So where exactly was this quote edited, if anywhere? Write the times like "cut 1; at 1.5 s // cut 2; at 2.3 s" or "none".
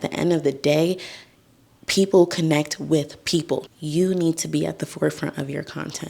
cut 1; at 3.7 s